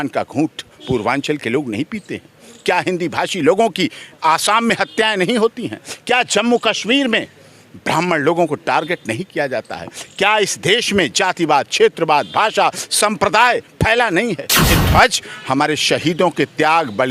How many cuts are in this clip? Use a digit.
1